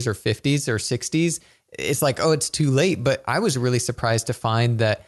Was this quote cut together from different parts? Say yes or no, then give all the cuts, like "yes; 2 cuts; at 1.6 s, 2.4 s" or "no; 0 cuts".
no; 0 cuts